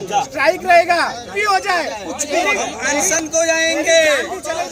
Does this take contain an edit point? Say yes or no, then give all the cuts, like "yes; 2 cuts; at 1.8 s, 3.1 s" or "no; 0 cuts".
yes; 1 cut; at 1.3 s